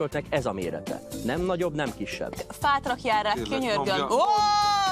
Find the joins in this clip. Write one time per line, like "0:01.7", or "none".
0:02.4